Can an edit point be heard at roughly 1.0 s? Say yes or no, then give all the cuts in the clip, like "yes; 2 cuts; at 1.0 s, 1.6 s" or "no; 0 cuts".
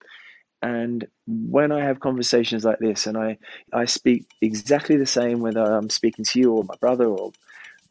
no; 1 cut; at 3.7 s